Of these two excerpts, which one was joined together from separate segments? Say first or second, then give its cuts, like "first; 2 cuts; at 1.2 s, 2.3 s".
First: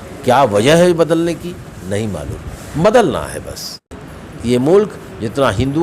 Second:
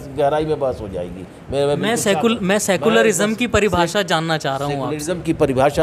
first; 1 cut; at 3.8 s